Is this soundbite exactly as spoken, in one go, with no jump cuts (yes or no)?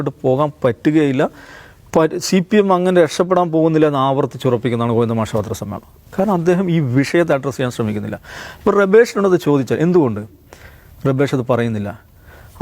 yes